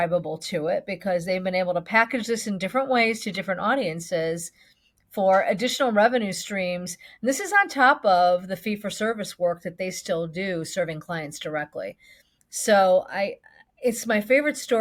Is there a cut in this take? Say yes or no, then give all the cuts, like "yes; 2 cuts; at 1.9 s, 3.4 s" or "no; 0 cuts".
no; 0 cuts